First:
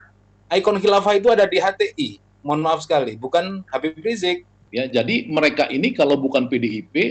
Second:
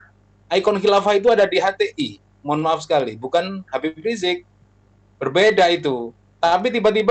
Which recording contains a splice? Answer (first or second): first